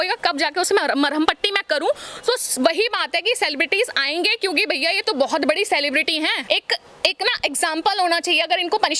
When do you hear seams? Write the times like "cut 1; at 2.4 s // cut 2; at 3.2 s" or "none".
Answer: cut 1; at 6.4 s